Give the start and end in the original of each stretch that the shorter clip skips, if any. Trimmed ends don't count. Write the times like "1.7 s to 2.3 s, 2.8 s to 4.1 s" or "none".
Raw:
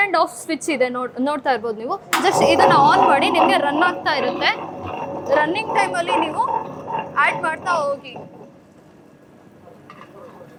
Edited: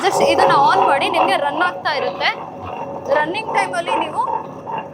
none